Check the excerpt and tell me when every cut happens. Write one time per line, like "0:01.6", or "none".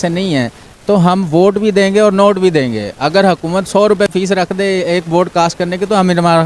none